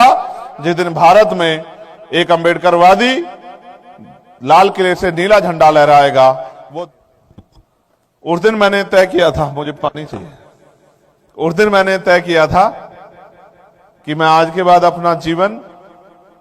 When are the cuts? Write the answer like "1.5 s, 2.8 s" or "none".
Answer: 6.6 s